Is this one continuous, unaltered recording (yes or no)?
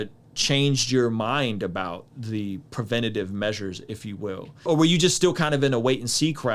no